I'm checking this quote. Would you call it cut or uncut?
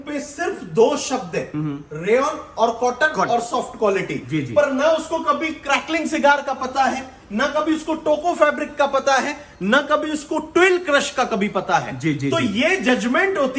uncut